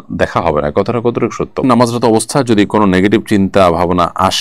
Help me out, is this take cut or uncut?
cut